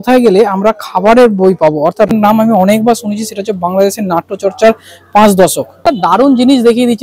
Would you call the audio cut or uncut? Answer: cut